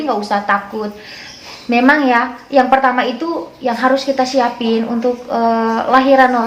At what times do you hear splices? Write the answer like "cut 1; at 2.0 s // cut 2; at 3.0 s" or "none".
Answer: none